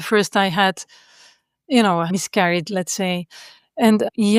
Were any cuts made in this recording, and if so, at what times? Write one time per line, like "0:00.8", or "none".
none